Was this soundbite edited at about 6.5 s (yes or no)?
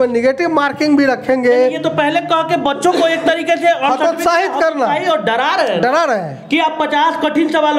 no